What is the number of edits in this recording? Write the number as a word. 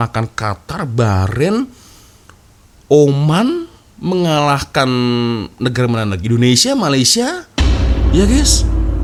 zero